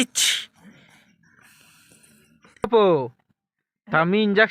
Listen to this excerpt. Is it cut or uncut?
cut